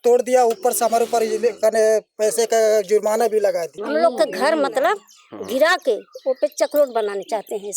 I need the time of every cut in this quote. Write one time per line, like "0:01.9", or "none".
0:03.8